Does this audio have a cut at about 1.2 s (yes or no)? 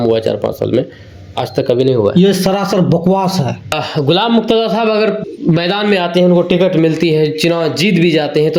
no